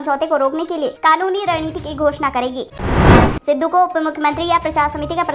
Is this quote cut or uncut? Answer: cut